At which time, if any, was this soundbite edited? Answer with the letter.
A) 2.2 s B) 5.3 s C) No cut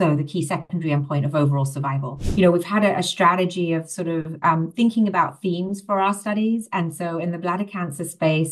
A